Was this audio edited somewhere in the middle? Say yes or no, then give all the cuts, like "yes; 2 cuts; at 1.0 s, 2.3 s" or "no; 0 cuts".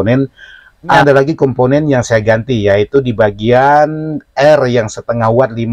yes; 1 cut; at 1.0 s